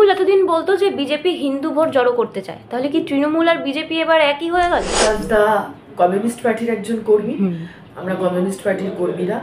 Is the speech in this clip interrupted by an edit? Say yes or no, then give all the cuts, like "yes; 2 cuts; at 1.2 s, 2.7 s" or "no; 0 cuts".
yes; 1 cut; at 4.9 s